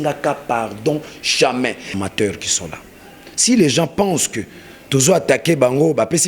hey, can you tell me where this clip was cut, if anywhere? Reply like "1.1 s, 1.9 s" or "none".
1.9 s